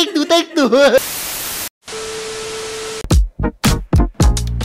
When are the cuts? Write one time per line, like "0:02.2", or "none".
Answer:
none